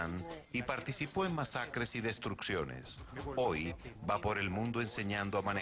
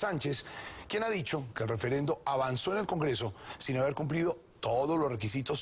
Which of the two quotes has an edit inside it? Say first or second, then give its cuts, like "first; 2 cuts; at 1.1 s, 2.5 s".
second; 1 cut; at 2.2 s